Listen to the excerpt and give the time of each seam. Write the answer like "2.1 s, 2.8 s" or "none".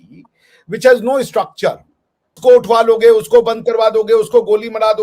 2.4 s